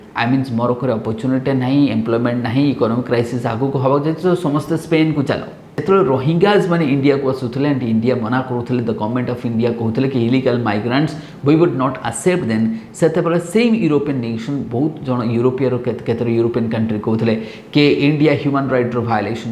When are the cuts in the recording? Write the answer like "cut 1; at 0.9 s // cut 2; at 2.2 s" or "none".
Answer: cut 1; at 5.8 s